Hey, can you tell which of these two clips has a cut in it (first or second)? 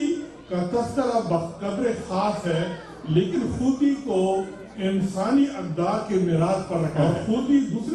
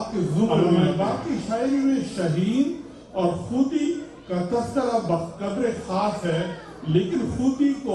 first